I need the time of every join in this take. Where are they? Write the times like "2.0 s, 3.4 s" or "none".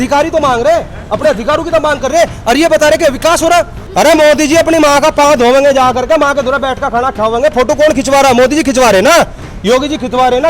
3.8 s